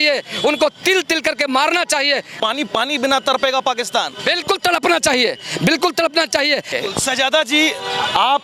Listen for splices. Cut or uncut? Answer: cut